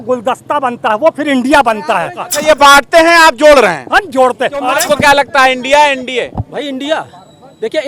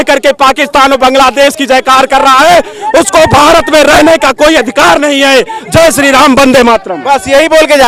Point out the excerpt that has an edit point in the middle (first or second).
first